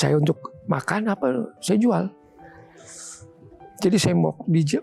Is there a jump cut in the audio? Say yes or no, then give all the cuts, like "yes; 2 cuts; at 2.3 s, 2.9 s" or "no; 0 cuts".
no; 0 cuts